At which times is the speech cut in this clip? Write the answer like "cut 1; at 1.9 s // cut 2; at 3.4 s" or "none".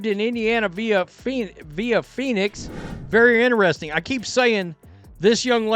cut 1; at 3.0 s